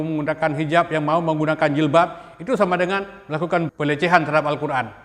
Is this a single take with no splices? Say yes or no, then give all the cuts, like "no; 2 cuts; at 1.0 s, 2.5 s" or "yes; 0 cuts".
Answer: no; 1 cut; at 3.7 s